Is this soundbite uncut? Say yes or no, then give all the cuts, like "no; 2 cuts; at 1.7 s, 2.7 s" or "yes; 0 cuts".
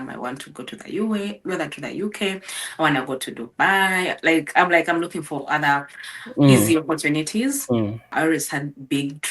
no; 1 cut; at 8.1 s